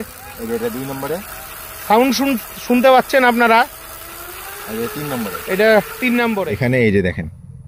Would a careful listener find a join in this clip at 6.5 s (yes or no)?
yes